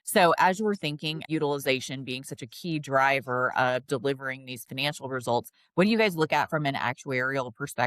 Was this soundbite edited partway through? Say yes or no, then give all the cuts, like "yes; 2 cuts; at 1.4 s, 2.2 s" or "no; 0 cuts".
yes; 1 cut; at 1.3 s